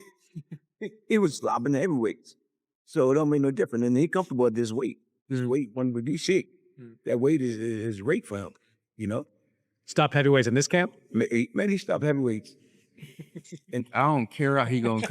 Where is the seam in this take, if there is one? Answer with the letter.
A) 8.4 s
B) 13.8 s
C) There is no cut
B